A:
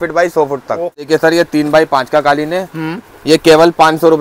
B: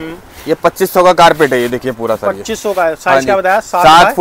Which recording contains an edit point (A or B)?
A